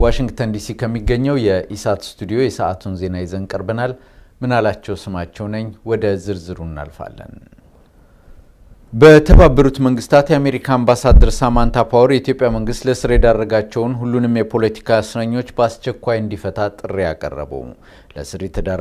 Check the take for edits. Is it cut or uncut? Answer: uncut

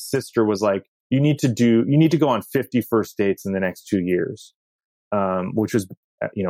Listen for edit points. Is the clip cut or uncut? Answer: uncut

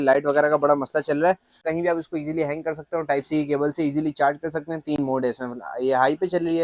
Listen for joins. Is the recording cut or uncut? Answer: cut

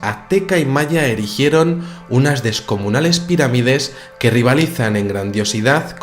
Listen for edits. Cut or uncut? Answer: uncut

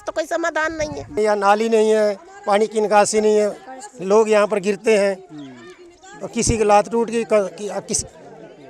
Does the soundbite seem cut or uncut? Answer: cut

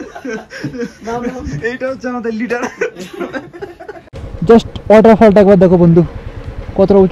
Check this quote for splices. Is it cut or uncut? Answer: cut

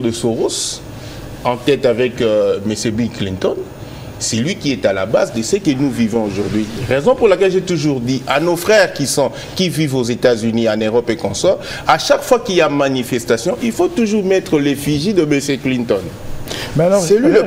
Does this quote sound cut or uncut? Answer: uncut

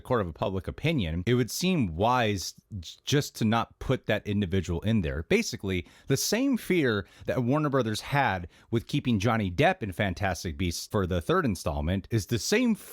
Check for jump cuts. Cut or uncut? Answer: cut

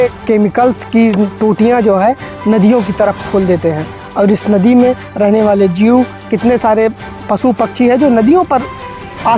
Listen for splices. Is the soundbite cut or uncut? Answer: uncut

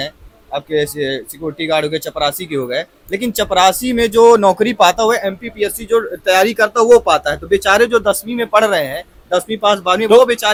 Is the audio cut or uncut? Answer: uncut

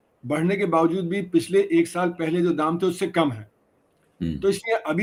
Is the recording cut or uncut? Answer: uncut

